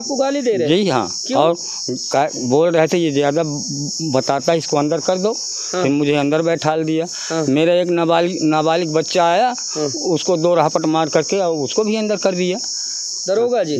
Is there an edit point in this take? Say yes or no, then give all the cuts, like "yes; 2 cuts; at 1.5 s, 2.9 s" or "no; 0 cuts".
no; 0 cuts